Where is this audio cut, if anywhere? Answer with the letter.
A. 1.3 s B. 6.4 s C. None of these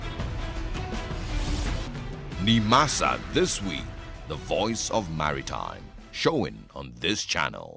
A